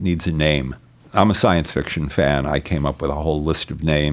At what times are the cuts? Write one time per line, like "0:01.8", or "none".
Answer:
0:00.9